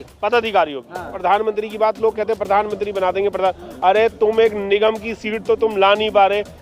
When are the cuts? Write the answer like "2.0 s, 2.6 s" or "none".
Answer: 1.1 s